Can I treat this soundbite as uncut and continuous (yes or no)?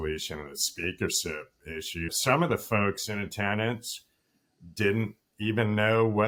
yes